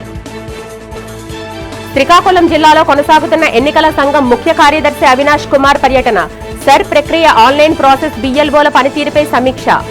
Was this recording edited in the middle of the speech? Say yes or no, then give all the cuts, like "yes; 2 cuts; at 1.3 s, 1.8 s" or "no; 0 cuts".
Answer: yes; 1 cut; at 0.9 s